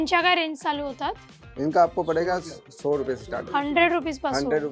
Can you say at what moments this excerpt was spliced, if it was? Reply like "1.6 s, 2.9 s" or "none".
none